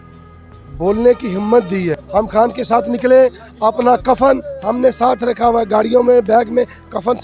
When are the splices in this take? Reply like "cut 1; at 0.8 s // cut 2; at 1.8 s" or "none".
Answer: cut 1; at 2.0 s